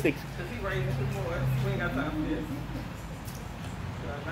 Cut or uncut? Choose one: uncut